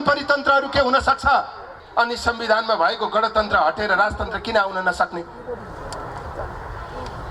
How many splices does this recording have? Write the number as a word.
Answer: one